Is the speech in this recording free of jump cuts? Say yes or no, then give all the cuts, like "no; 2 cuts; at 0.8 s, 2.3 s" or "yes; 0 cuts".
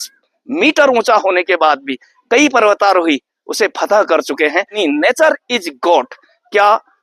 no; 1 cut; at 4.8 s